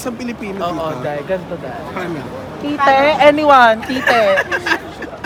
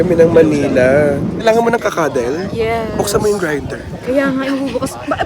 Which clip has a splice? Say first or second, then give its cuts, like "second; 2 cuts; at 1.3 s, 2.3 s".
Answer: second; 1 cut; at 1.3 s